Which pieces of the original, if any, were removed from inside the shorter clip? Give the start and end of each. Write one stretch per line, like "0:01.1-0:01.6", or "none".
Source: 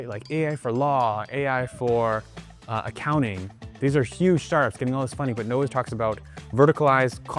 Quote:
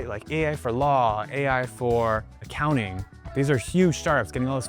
0:02.5-0:02.9